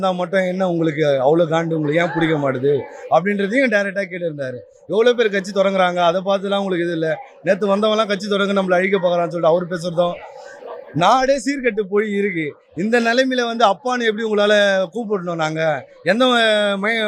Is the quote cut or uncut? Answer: uncut